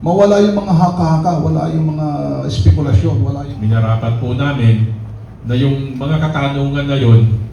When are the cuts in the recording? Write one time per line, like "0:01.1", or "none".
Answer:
0:03.3